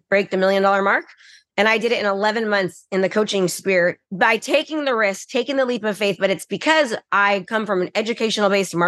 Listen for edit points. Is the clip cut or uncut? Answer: cut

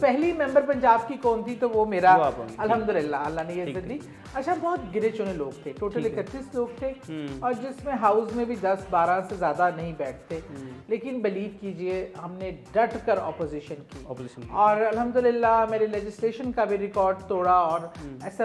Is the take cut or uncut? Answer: uncut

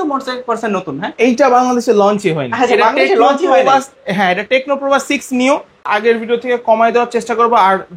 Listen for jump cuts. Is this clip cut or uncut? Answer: cut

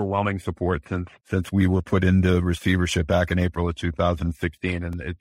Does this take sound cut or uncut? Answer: uncut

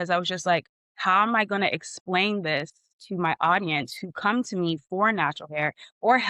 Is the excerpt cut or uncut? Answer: uncut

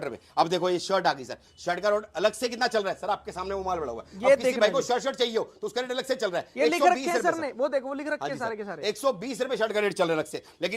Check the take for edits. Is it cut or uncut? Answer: uncut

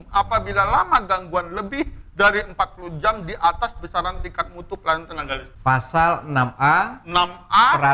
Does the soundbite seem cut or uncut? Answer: cut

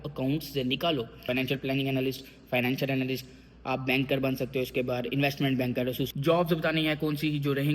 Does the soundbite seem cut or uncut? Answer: cut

